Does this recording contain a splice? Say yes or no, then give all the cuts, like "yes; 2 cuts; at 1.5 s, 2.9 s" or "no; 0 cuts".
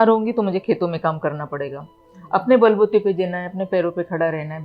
no; 0 cuts